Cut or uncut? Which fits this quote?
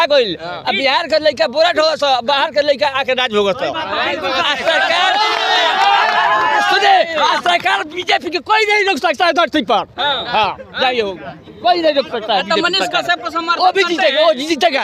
uncut